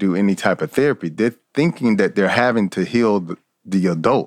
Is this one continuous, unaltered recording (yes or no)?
yes